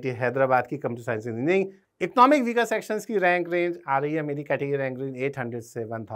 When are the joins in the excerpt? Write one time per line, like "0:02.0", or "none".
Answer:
0:01.8